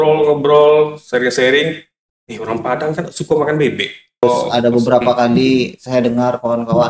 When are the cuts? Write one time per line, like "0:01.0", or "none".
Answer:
0:04.2